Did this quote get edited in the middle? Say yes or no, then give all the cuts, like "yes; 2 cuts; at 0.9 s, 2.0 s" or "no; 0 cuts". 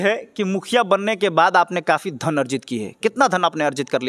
no; 0 cuts